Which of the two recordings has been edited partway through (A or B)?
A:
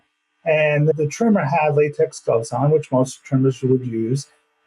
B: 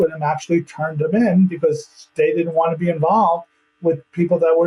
A